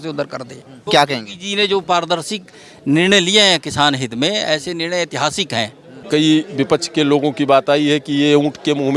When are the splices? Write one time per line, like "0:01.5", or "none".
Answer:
0:00.9
0:06.0